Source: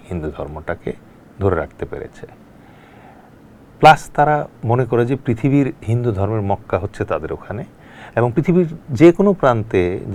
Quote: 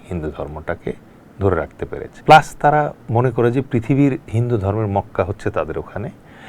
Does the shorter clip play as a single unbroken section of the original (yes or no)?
no